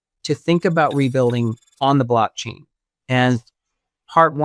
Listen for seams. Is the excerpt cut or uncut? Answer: cut